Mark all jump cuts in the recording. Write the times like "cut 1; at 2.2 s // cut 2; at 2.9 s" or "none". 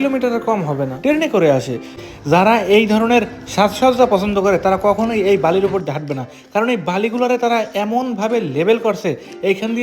cut 1; at 1.9 s